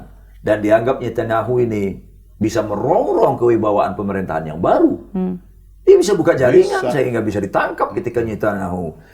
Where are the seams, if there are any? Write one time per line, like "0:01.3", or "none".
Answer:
none

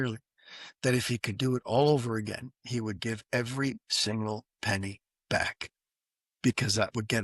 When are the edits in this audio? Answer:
none

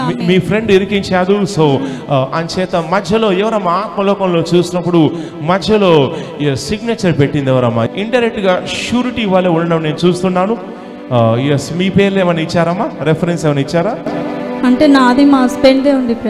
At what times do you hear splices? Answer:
0:07.9

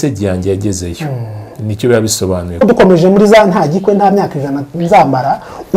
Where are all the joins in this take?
0:02.6

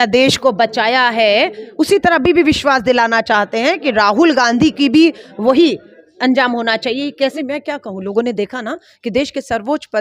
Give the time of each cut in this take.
0:07.3

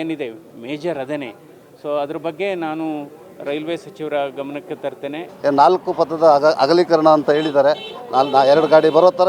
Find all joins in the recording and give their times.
0:05.2

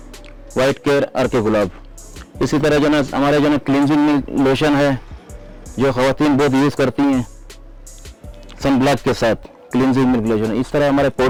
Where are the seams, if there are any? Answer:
none

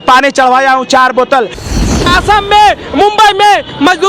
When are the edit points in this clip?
0:01.7

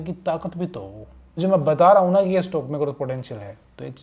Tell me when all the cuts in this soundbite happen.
0:01.4

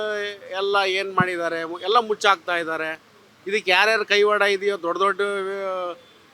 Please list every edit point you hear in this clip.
none

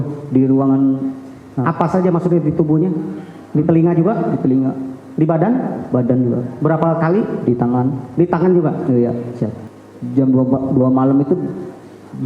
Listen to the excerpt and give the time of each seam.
0:09.6

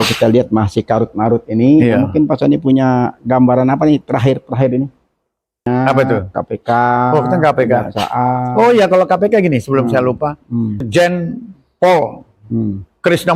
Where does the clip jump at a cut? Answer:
0:05.7
0:10.8

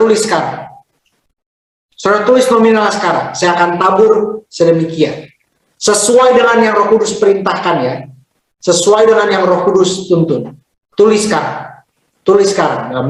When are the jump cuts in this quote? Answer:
none

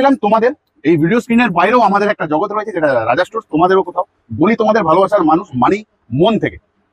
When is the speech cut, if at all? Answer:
none

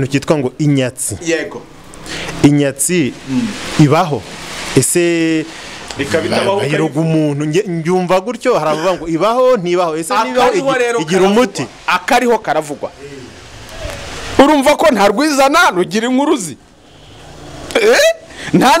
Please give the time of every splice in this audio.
none

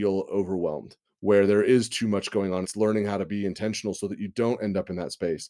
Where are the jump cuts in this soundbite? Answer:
0:02.7

